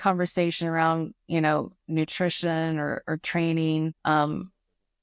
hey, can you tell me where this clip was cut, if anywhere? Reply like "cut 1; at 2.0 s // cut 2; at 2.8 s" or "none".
cut 1; at 4.0 s